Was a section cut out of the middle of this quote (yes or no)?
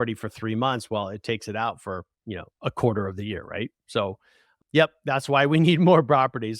yes